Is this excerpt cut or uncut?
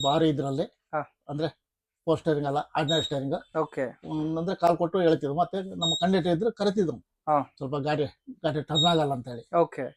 uncut